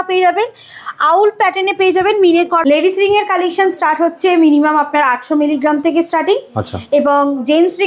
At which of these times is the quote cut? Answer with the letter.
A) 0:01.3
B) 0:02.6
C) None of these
B